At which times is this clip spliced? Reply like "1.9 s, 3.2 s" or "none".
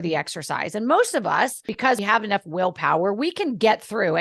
1.9 s